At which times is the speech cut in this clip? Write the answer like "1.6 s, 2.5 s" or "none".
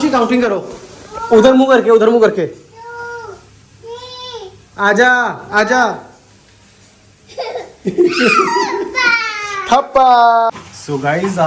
10.5 s